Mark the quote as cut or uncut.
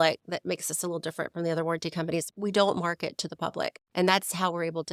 cut